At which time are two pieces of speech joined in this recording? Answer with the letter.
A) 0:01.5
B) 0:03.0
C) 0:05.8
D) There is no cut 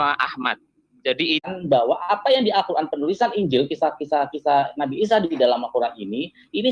A